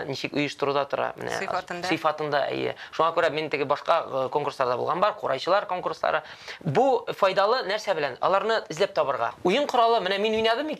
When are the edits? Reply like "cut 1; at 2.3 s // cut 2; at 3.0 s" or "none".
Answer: cut 1; at 9.3 s